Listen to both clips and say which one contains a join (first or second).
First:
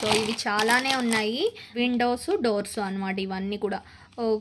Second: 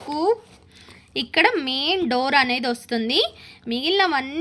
first